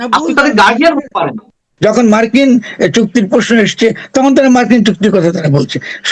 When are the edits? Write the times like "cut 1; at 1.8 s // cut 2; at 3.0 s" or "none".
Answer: cut 1; at 1.6 s